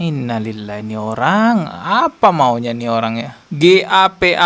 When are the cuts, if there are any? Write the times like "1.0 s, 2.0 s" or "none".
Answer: 3.4 s